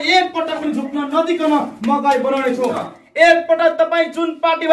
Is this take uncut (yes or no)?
no